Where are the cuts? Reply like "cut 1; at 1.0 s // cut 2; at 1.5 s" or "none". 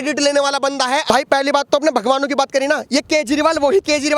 cut 1; at 1.0 s